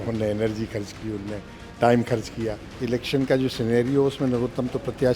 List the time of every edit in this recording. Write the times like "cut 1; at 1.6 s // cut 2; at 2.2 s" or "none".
cut 1; at 2.7 s